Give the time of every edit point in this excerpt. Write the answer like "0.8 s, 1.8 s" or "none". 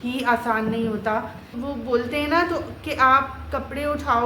1.5 s

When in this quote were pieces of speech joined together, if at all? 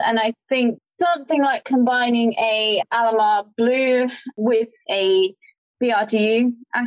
4.3 s

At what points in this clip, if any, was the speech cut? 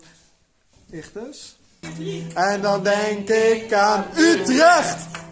1.9 s

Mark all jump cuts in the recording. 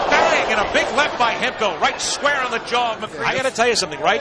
3.1 s

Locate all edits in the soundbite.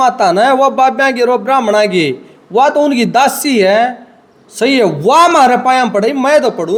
none

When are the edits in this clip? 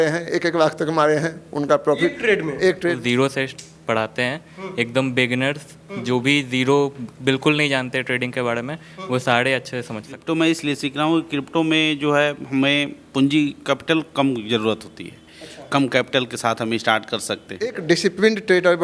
3.0 s, 10.2 s, 17.8 s

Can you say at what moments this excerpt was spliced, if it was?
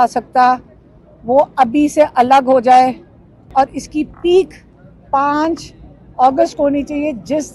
3.5 s

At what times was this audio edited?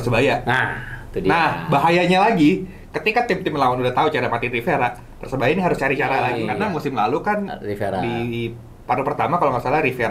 6.4 s

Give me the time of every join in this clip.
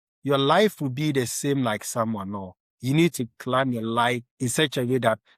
4.3 s

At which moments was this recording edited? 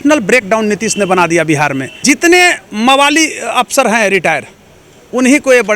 1.9 s

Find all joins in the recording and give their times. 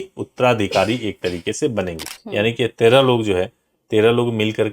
2.0 s

